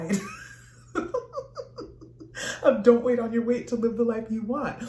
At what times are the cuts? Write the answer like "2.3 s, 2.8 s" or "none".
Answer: none

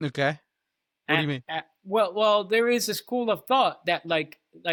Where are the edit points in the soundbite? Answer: none

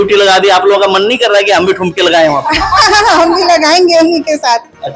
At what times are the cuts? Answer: none

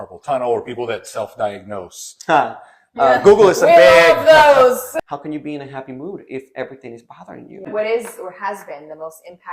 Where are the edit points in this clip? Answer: 4.9 s, 7.7 s

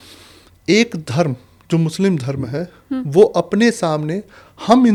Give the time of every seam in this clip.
none

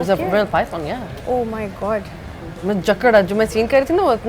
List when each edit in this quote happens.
none

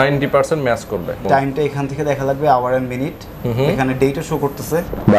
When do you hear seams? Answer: 1.2 s

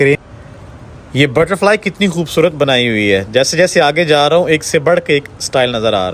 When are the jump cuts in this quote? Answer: none

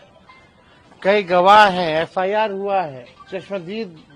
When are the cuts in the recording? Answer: 3.1 s

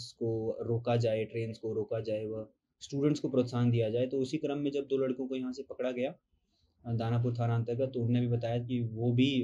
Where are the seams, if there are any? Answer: none

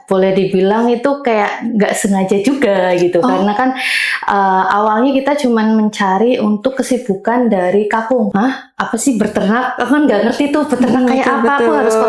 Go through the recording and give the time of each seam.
8.3 s

